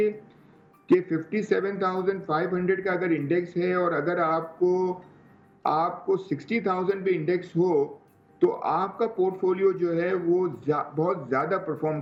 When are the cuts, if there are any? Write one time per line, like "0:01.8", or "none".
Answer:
none